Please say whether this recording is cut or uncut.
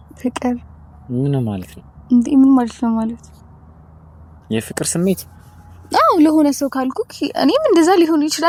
uncut